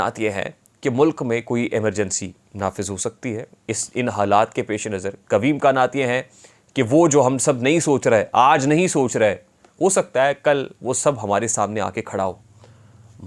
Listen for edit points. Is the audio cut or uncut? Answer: uncut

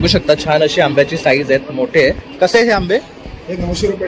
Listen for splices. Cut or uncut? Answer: uncut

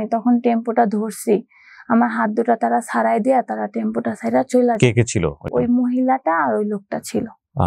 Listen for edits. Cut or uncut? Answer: uncut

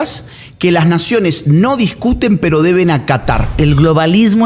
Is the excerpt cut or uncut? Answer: cut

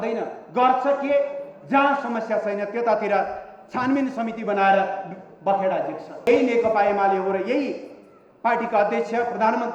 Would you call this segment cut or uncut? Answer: cut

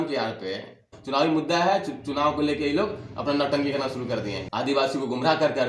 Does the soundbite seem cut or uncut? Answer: cut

